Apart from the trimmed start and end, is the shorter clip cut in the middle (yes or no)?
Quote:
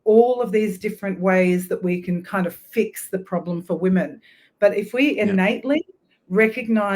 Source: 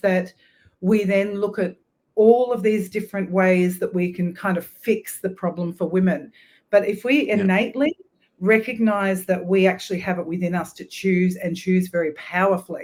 no